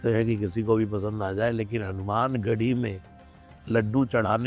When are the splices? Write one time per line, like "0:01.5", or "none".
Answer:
none